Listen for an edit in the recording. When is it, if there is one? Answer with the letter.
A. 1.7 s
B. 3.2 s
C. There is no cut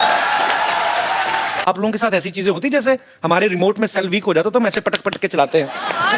A